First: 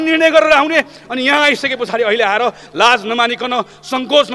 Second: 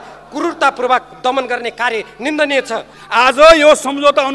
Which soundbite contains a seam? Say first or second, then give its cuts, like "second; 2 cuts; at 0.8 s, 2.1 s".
second; 1 cut; at 3.0 s